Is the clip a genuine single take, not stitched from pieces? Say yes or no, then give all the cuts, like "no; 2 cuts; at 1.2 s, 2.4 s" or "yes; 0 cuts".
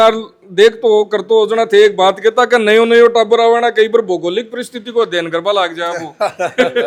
yes; 0 cuts